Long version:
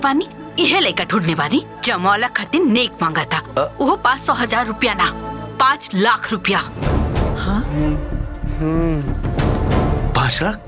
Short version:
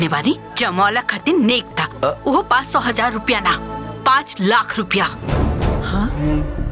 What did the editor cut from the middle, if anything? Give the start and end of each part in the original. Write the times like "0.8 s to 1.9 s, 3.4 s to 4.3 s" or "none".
2.9 s to 3.2 s